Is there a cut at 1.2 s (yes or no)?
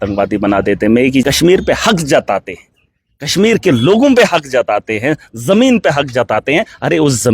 yes